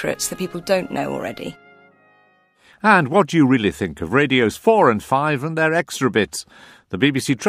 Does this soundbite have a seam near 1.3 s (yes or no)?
yes